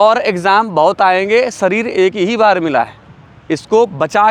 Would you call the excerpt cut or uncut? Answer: uncut